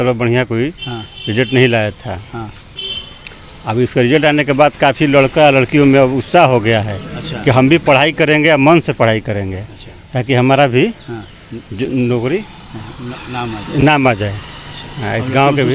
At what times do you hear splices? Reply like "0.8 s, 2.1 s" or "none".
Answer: none